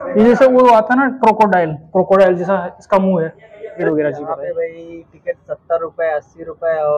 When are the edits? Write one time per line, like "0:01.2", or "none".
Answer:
0:03.9